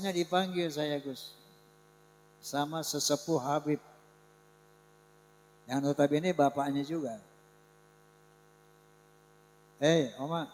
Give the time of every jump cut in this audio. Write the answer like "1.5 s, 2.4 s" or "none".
none